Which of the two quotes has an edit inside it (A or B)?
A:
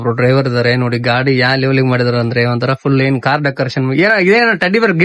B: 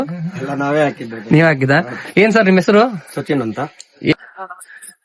B